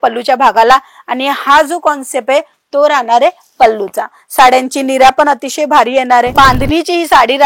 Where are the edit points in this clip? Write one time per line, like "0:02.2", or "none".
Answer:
0:06.3